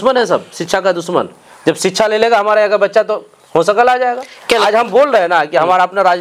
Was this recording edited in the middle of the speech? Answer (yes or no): no